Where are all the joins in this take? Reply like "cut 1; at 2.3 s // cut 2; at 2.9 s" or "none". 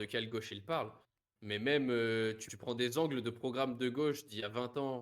cut 1; at 2.5 s